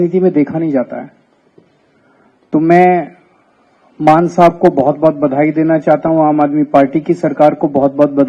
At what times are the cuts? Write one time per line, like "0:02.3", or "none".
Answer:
none